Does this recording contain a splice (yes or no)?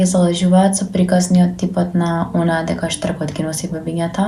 no